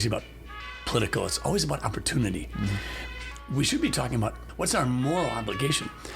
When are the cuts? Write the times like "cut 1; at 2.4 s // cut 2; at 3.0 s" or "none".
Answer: cut 1; at 4.4 s